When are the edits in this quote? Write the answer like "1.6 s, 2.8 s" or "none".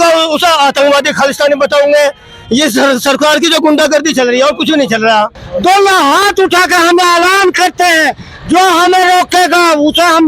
5.4 s